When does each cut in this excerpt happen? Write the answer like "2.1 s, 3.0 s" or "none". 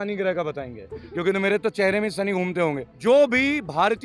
2.9 s